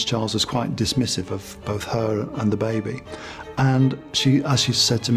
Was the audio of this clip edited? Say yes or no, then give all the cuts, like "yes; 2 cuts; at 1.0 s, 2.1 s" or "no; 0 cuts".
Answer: no; 0 cuts